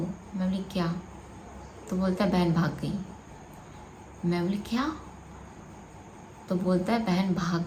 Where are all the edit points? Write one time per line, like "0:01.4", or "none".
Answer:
none